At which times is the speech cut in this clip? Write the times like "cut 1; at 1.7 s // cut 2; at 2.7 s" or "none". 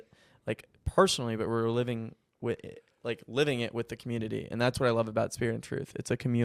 none